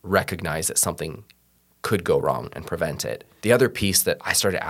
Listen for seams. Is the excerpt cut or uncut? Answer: cut